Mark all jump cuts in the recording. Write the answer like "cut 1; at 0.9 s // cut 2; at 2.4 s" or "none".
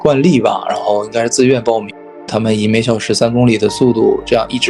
cut 1; at 2.3 s